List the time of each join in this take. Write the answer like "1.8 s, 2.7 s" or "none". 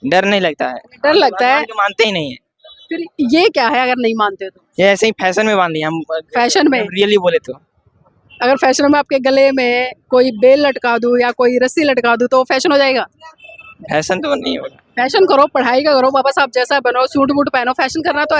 none